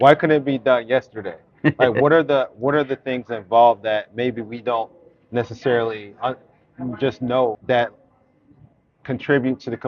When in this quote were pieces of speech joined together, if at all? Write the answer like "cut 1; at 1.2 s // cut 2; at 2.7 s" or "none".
cut 1; at 7.6 s

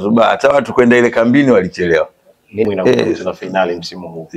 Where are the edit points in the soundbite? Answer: cut 1; at 2.7 s

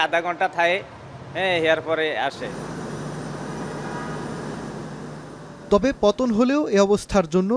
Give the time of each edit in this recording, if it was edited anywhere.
none

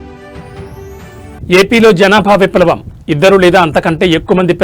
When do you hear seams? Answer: cut 1; at 1.4 s

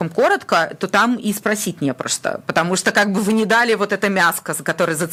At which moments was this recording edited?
none

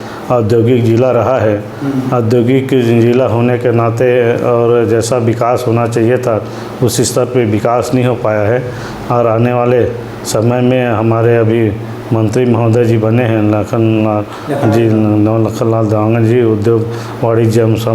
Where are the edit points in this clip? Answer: none

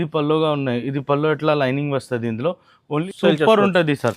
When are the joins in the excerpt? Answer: cut 1; at 3.1 s

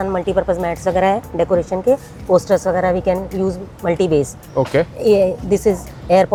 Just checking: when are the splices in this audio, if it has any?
none

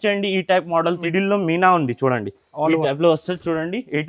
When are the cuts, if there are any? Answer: cut 1; at 1.1 s

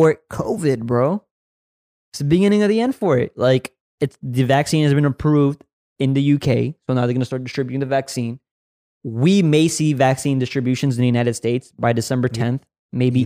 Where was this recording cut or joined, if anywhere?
none

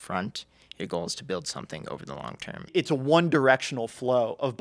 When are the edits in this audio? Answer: cut 1; at 2.7 s

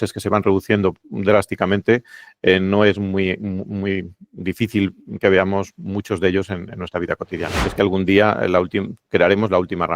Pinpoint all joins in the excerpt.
cut 1; at 7.6 s

